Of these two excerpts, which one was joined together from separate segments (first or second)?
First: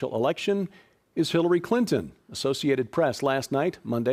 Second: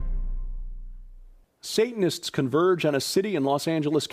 first